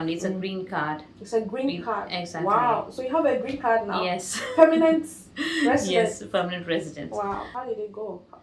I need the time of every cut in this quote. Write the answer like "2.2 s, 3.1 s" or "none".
7.5 s